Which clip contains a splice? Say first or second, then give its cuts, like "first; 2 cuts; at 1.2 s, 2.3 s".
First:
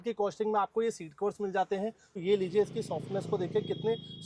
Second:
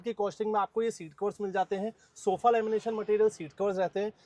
first; 1 cut; at 2.2 s